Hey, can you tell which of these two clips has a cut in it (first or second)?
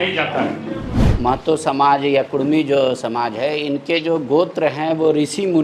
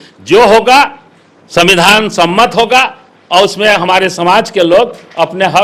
first